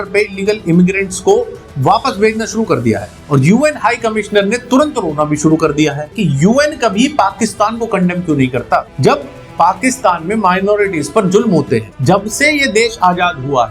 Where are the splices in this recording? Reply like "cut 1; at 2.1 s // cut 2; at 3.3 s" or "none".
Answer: cut 1; at 6.1 s // cut 2; at 8.9 s // cut 3; at 11.9 s